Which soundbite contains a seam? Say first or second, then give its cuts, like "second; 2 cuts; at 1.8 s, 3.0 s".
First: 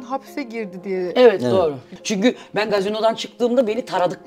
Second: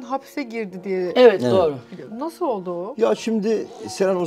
first; 1 cut; at 2.0 s